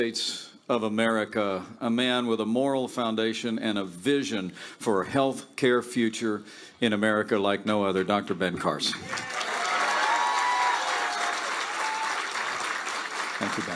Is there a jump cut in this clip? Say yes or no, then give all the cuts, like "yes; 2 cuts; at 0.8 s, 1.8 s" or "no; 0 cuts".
yes; 1 cut; at 9.5 s